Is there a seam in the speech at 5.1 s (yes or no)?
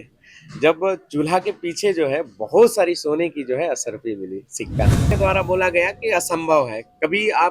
yes